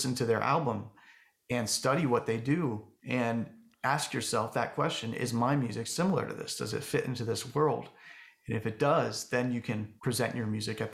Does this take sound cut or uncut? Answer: cut